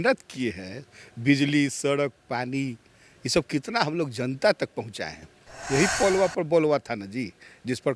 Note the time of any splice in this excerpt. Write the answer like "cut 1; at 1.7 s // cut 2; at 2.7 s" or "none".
none